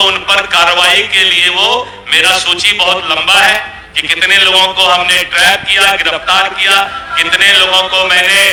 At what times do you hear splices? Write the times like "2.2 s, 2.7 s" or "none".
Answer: none